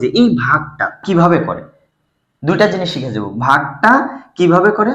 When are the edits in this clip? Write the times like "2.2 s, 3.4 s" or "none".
1.0 s